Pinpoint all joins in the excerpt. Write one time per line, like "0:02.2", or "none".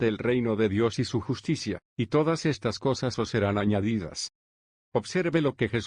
none